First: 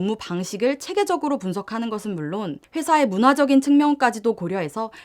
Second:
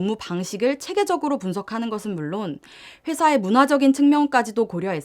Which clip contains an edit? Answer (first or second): first